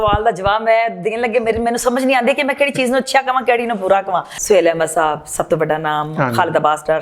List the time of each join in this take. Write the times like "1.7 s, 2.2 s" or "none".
4.3 s